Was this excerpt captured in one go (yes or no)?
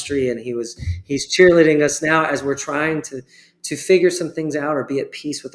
yes